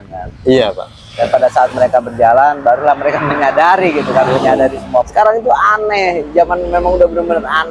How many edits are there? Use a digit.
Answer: 1